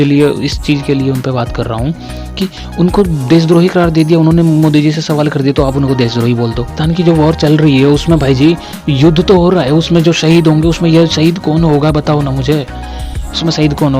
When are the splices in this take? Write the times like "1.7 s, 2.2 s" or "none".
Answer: 6.7 s